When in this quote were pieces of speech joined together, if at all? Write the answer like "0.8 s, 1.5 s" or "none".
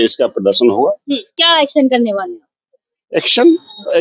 1.4 s